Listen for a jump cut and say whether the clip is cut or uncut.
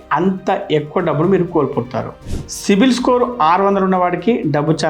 cut